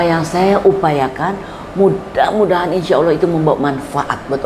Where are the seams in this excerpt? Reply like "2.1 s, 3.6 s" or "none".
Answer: none